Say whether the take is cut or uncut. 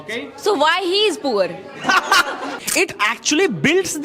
cut